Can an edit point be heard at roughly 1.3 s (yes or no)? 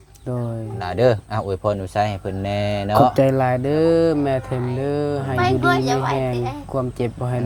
no